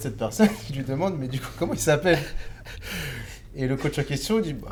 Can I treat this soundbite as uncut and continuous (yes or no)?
yes